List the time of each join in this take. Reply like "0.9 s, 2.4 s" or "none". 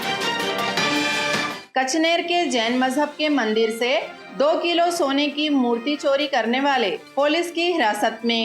1.6 s